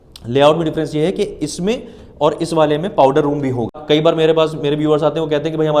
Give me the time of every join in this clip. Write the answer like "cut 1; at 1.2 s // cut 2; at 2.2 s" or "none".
cut 1; at 3.8 s